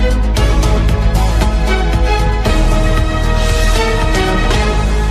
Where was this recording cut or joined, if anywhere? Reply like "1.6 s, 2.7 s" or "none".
none